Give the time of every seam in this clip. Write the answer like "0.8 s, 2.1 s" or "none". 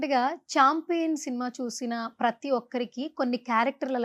none